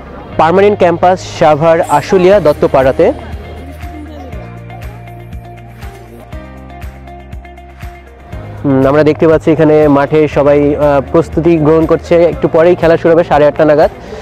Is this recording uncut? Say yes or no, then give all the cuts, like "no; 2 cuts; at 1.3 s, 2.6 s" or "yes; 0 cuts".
yes; 0 cuts